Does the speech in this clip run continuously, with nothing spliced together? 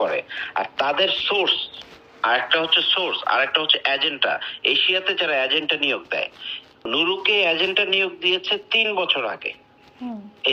no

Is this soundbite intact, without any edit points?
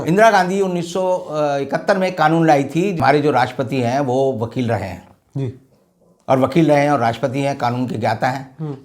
no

